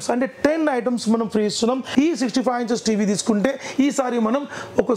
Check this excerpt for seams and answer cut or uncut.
cut